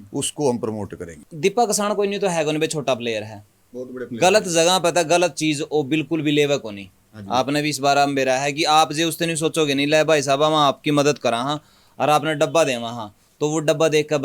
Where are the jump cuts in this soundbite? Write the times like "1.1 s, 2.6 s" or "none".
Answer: 1.2 s